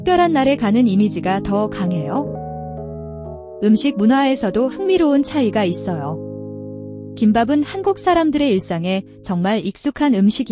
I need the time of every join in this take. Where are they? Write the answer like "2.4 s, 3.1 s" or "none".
2.2 s, 3.5 s